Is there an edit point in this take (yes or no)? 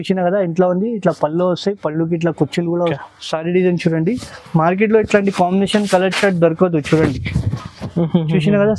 yes